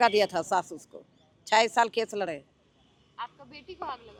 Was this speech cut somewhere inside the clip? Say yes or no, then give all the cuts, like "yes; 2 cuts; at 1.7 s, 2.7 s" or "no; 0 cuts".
no; 0 cuts